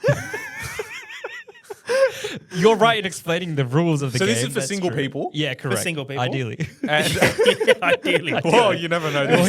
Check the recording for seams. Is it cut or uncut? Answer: uncut